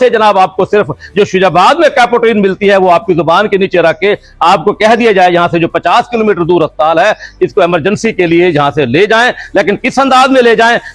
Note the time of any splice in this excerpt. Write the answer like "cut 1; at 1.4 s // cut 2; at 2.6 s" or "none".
none